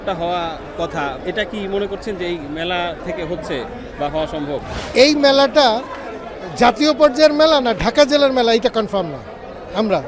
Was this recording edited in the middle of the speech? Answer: yes; 3 cuts; at 1.2 s, 3.0 s, 4.8 s

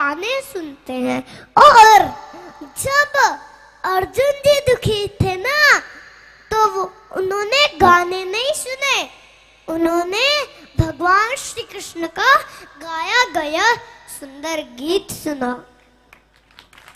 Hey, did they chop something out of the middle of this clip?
no; 0 cuts

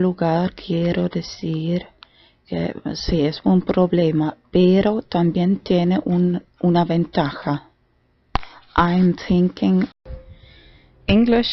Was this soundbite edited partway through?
no; 0 cuts

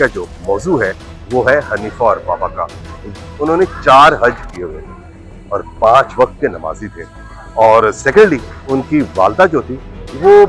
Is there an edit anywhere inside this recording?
yes; 1 cut; at 3.1 s

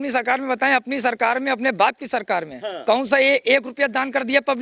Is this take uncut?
yes; 0 cuts

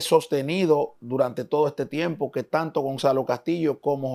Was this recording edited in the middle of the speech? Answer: no; 0 cuts

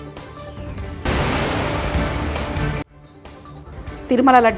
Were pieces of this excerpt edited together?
yes; 2 cuts; at 1.0 s, 2.9 s

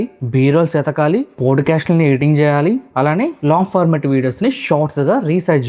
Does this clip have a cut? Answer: no; 0 cuts

